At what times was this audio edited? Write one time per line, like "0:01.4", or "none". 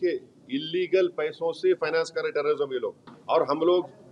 0:03.1